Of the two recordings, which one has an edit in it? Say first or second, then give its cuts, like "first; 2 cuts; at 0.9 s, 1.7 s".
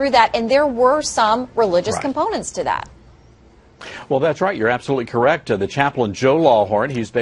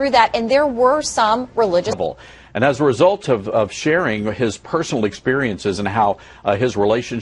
first; 1 cut; at 1.9 s